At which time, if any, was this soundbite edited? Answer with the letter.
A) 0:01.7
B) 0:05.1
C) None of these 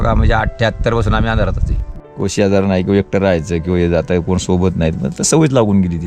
A